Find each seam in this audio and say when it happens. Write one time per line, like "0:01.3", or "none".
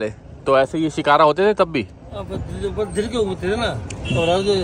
none